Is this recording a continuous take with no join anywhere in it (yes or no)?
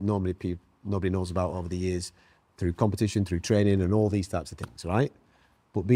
yes